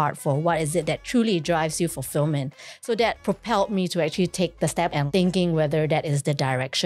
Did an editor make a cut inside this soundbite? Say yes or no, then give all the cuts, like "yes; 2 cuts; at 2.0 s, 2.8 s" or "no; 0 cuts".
yes; 1 cut; at 4.9 s